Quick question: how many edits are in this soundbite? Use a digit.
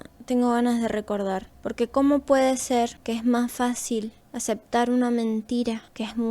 1